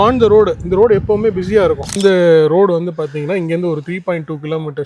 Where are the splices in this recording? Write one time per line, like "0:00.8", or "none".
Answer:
0:01.9